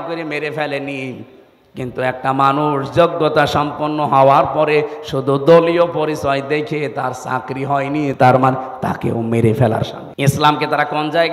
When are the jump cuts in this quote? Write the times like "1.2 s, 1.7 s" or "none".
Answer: 10.0 s